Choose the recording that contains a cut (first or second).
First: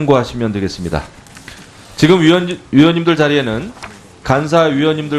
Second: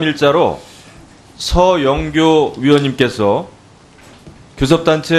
first